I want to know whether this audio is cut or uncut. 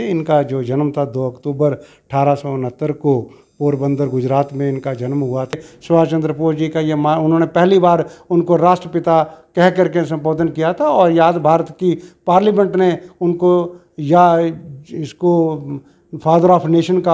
cut